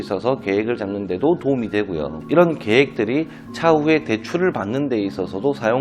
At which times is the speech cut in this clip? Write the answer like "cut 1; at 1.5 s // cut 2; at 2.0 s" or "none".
none